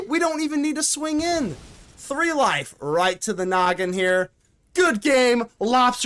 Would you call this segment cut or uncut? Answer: uncut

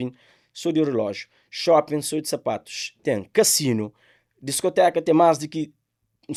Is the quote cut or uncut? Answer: uncut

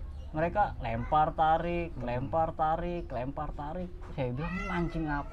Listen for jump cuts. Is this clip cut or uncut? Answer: uncut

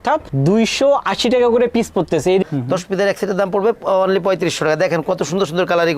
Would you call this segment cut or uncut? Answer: cut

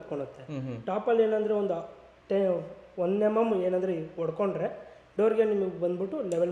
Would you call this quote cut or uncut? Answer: uncut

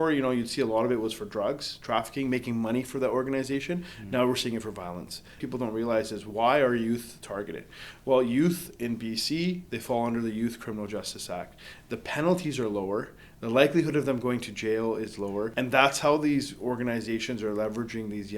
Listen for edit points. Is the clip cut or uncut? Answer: cut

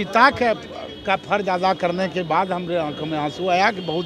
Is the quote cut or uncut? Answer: uncut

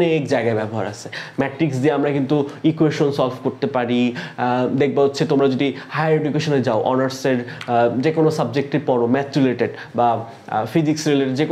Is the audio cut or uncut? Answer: uncut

